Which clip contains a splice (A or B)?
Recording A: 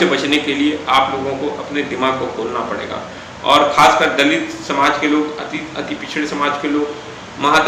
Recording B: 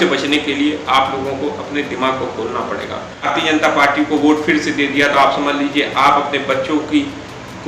B